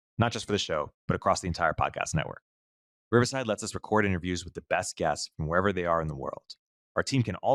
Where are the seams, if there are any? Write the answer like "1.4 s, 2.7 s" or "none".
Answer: none

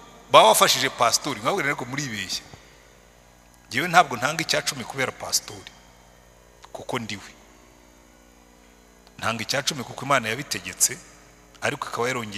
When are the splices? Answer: none

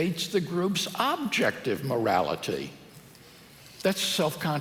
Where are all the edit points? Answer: none

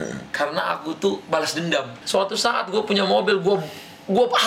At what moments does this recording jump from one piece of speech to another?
1.9 s

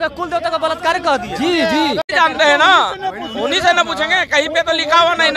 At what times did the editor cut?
2.1 s

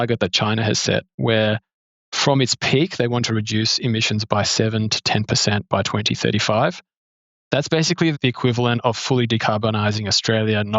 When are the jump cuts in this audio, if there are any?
8.2 s

